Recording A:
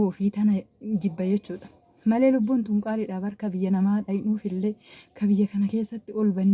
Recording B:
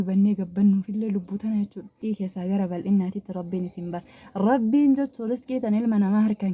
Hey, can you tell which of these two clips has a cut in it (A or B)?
B